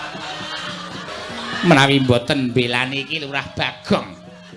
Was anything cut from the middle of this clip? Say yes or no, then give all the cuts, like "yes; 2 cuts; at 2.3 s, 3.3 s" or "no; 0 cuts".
yes; 1 cut; at 1.1 s